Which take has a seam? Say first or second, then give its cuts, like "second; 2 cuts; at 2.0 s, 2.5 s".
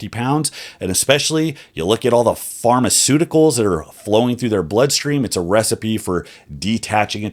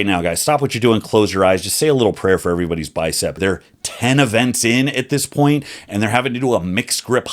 second; 1 cut; at 3.4 s